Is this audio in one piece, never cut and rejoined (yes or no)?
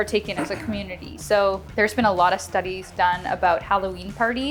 no